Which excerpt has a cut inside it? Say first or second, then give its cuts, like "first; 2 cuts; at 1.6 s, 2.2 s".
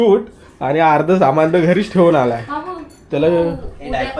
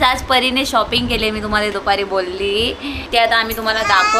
second; 1 cut; at 2.9 s